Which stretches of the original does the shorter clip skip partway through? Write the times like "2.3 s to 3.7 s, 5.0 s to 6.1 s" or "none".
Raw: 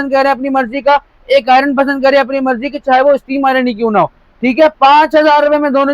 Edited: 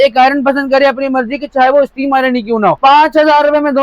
4.1 s to 4.8 s